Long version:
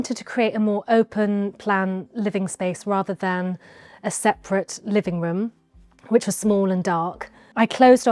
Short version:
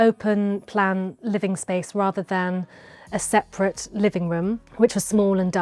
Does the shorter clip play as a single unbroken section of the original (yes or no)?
no